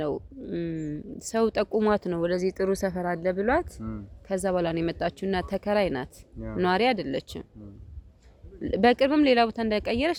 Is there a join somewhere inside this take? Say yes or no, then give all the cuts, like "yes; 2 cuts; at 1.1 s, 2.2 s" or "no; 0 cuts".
no; 0 cuts